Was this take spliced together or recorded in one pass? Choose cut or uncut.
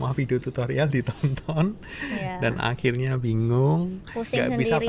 uncut